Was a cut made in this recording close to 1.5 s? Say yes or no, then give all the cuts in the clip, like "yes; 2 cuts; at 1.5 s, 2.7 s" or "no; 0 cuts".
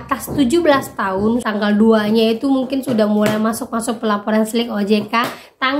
yes; 1 cut; at 1.5 s